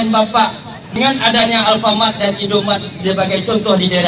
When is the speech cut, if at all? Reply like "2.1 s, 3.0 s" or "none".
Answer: 1.0 s